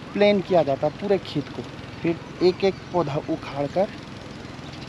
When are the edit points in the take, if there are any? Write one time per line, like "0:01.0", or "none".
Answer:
0:01.6